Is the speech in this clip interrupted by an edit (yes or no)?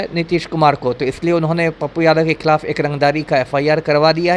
no